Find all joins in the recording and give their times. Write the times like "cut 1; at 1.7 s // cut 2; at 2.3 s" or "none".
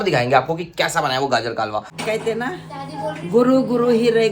cut 1; at 1.9 s